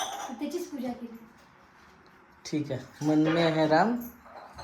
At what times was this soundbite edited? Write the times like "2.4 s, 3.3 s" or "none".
none